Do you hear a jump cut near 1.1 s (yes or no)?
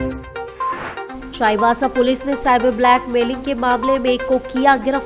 yes